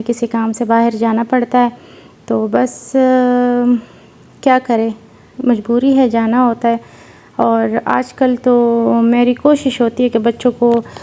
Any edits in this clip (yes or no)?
no